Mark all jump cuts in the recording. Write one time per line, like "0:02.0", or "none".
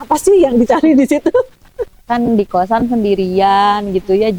0:01.8